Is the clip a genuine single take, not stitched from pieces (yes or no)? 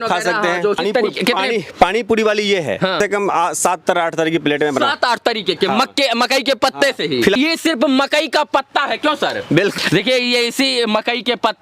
no